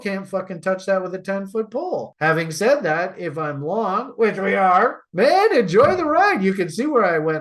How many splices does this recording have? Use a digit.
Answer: 1